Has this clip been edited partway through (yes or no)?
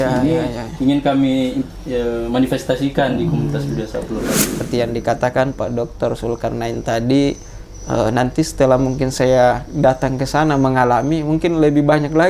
yes